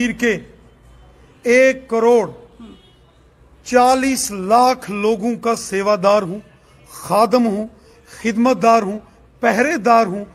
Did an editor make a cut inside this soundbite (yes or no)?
no